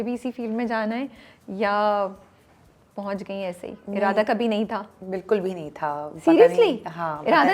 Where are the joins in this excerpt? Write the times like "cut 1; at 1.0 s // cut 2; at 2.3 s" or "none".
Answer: none